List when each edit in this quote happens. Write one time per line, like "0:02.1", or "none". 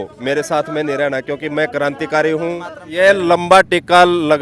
0:02.8